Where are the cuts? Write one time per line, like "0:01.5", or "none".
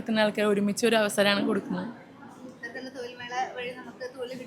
none